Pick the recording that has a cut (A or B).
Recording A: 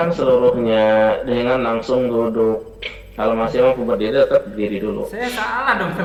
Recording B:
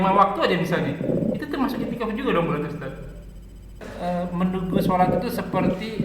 B